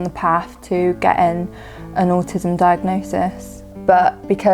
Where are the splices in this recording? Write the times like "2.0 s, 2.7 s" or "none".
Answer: 3.4 s